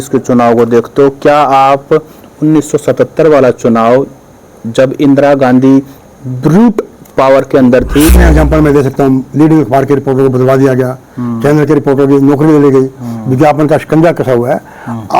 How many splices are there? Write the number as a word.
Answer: one